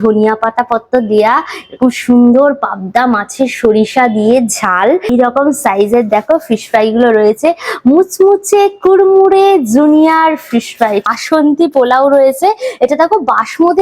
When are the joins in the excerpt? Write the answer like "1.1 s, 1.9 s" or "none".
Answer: 5.1 s, 11.1 s